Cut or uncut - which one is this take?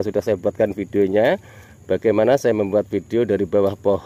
uncut